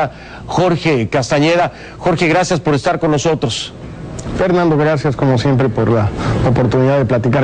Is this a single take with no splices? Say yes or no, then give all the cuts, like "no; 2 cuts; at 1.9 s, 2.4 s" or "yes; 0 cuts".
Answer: yes; 0 cuts